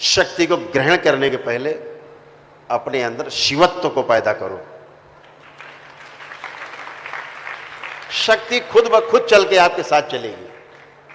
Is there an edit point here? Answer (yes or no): no